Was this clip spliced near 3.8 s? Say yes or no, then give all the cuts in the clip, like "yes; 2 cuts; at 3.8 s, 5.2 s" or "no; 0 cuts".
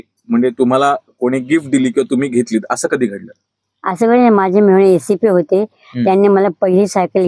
no; 0 cuts